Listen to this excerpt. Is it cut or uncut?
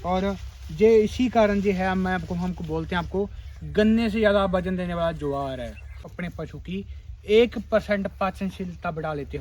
cut